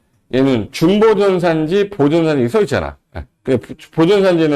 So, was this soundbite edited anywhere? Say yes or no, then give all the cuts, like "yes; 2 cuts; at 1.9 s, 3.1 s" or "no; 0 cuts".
no; 0 cuts